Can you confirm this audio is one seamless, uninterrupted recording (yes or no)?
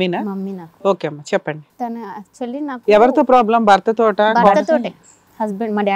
no